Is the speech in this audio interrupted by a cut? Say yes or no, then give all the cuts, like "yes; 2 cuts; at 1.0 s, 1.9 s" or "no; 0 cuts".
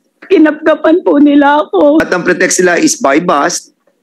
yes; 1 cut; at 2.0 s